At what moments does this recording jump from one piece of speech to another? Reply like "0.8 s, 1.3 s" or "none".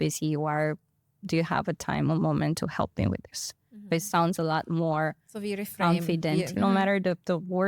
6.5 s